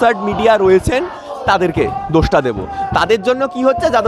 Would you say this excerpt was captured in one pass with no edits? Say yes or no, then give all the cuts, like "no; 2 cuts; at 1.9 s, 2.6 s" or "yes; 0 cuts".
yes; 0 cuts